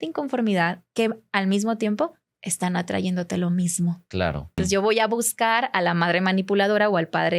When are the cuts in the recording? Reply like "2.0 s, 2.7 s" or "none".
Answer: 4.6 s